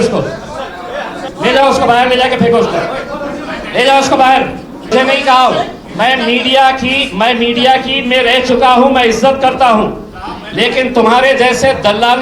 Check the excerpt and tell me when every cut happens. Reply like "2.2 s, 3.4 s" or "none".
1.2 s, 4.9 s